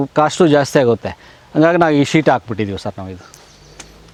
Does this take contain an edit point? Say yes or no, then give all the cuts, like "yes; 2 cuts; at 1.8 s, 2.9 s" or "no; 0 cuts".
no; 0 cuts